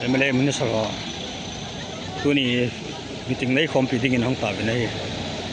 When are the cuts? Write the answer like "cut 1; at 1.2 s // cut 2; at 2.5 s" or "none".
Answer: none